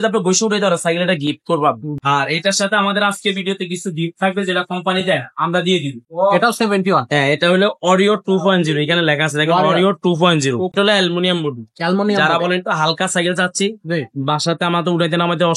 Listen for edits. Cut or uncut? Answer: cut